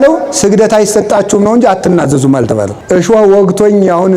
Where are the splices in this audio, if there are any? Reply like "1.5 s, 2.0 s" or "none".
2.8 s